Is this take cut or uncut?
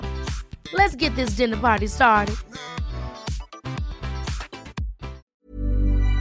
cut